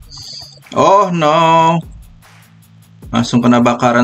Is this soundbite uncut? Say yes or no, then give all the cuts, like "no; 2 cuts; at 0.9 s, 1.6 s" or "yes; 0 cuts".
yes; 0 cuts